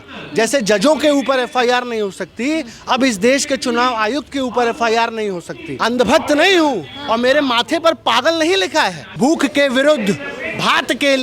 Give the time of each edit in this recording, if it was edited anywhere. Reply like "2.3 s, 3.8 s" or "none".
5.6 s, 9.0 s